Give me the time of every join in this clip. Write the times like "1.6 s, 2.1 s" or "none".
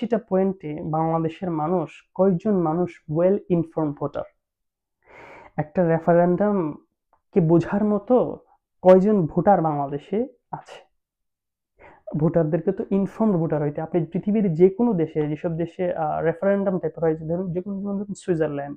none

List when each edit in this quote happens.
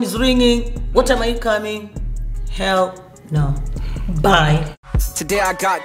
4.8 s

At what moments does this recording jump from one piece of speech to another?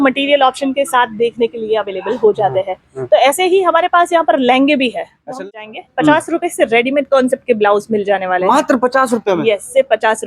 5.2 s

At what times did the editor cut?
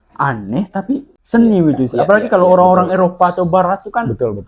1.1 s

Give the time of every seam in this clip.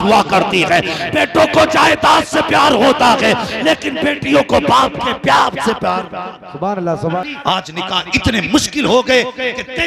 7.2 s

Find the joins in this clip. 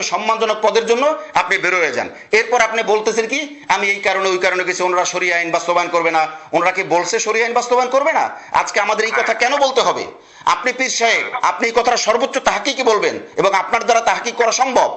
none

